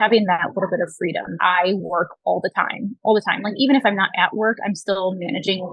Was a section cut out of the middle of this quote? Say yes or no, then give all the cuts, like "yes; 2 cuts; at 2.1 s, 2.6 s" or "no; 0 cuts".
yes; 1 cut; at 1.3 s